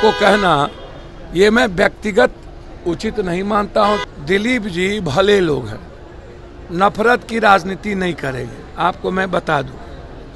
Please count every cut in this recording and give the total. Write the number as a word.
one